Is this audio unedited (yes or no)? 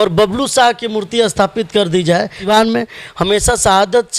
no